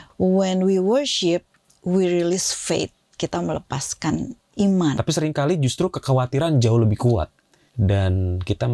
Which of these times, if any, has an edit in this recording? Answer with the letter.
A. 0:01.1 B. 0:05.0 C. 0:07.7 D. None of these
B